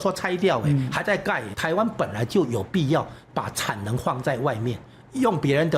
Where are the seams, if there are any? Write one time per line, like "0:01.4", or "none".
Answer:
0:01.5